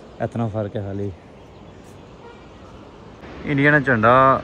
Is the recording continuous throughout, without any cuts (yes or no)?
no